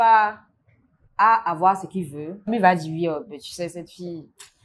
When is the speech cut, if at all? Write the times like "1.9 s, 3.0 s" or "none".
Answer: 2.5 s

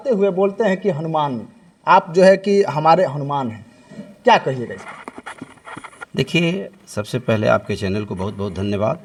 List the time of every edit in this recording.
none

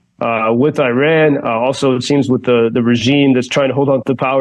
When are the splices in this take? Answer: none

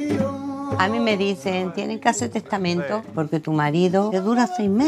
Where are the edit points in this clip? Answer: 0.8 s, 3.1 s, 4.1 s

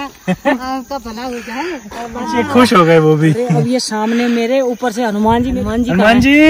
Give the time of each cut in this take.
2.4 s, 5.5 s

